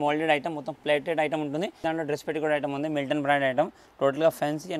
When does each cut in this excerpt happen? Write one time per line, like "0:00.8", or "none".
0:01.8